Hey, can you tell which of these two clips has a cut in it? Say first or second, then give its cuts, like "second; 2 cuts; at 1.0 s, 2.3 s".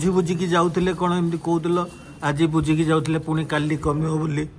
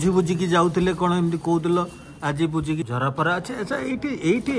second; 1 cut; at 2.8 s